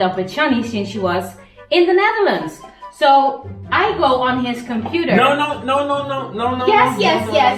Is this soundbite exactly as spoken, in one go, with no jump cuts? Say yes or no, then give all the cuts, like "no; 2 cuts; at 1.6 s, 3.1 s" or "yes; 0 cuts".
yes; 0 cuts